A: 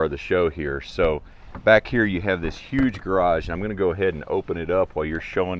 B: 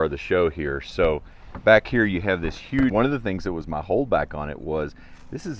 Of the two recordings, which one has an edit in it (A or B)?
B